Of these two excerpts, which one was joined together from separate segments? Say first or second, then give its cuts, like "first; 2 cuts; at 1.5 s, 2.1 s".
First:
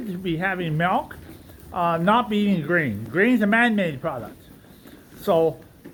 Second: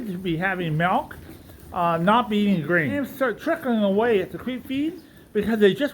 second; 1 cut; at 3.0 s